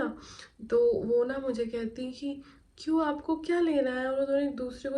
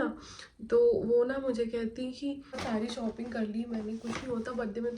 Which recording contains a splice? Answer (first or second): second